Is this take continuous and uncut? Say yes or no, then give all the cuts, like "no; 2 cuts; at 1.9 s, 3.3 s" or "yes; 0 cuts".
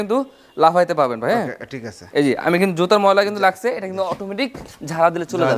yes; 0 cuts